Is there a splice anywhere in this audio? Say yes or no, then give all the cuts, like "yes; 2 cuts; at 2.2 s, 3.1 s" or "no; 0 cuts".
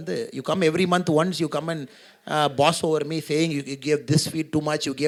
no; 0 cuts